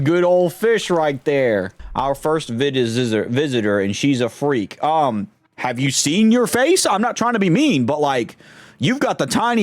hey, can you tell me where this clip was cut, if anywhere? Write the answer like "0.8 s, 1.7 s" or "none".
1.8 s